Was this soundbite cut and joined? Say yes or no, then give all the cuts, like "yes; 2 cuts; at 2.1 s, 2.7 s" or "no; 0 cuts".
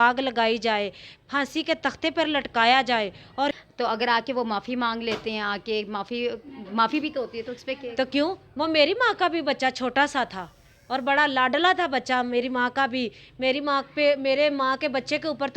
yes; 1 cut; at 3.5 s